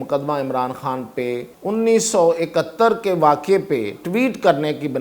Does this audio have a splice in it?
yes; 1 cut; at 1.5 s

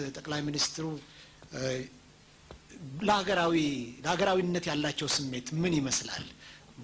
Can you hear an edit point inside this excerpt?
no; 0 cuts

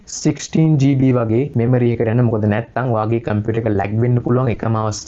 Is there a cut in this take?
no; 0 cuts

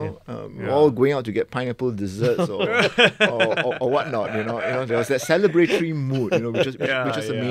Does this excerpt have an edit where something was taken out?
no; 0 cuts

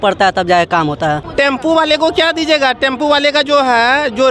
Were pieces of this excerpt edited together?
yes; 1 cut; at 1.3 s

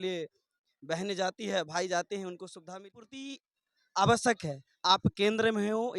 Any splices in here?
yes; 1 cut; at 2.7 s

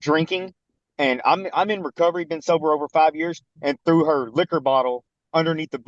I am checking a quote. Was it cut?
no; 0 cuts

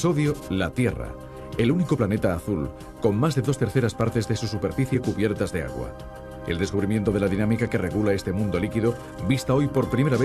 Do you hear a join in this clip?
no; 0 cuts

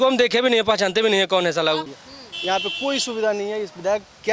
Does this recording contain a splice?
yes; 1 cut; at 1.9 s

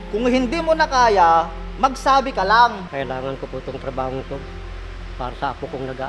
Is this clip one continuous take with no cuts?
no; 1 cut; at 2.8 s

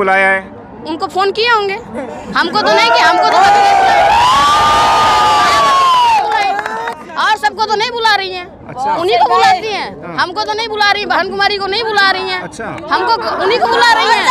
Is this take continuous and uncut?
yes; 0 cuts

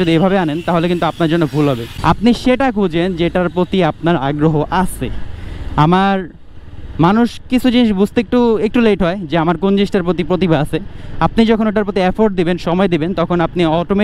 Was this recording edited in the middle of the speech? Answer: yes; 1 cut; at 1.9 s

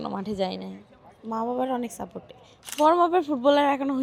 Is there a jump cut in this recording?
yes; 1 cut; at 2.8 s

